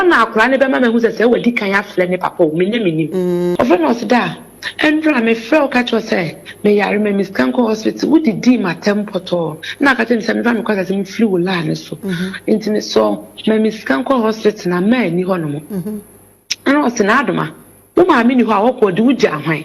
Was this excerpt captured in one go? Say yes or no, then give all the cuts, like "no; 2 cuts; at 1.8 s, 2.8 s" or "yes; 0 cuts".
no; 1 cut; at 3.5 s